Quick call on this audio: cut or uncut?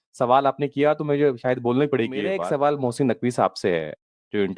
cut